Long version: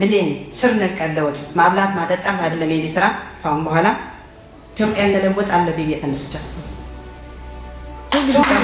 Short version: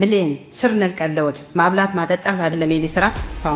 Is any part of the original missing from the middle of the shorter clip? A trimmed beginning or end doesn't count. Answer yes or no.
no